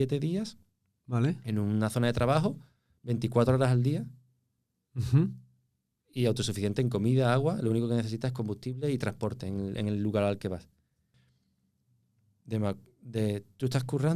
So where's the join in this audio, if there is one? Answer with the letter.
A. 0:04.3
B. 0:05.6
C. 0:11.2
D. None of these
C